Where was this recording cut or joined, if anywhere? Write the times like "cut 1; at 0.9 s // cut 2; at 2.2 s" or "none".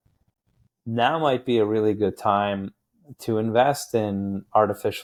none